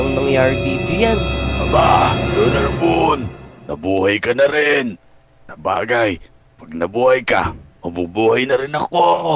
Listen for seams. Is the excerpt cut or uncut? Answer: cut